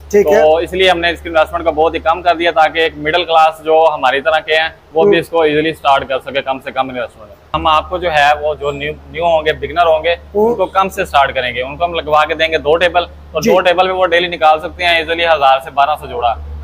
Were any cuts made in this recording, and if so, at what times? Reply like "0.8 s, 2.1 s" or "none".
7.4 s